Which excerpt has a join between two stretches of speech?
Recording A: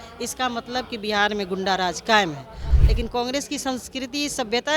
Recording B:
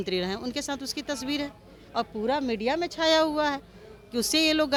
A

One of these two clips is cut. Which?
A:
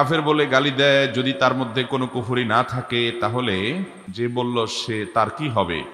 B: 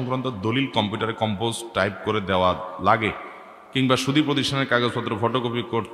A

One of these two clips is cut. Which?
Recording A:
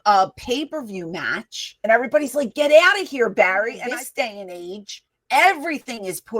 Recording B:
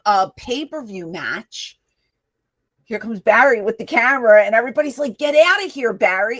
A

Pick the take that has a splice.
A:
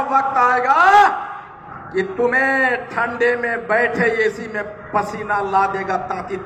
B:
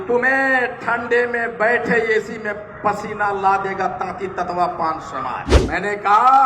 B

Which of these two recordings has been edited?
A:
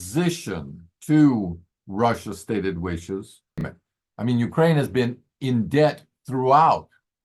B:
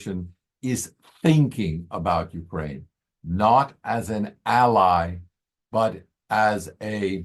A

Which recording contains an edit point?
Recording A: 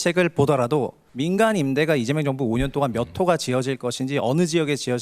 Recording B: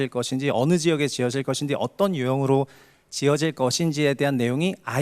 A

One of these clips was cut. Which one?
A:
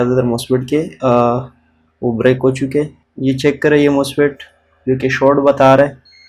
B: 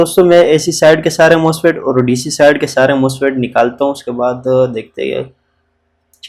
A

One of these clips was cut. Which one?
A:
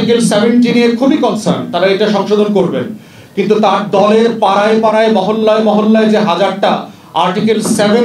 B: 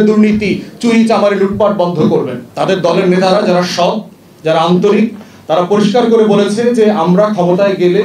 B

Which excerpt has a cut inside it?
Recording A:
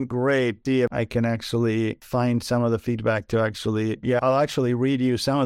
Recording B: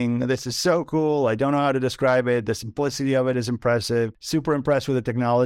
A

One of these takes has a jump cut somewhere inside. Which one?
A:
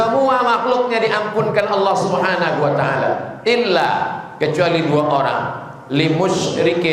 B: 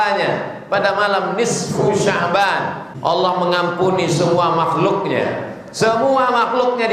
B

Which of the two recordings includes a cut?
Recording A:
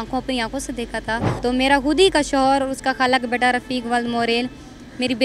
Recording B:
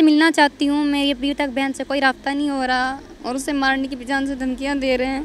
A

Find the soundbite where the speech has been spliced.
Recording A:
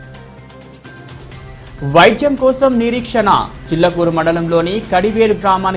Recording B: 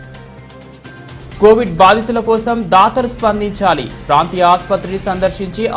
B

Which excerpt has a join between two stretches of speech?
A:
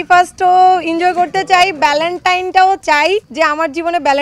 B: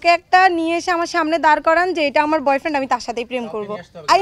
A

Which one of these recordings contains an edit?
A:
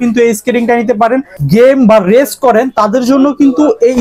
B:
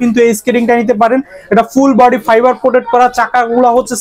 A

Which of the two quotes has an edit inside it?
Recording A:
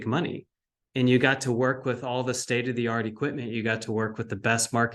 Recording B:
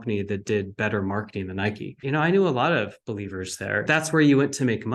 B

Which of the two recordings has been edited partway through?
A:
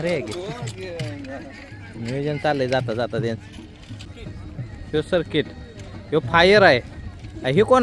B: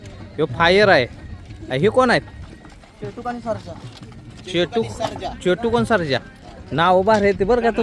A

